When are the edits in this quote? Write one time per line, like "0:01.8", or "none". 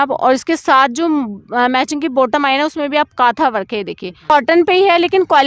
0:04.3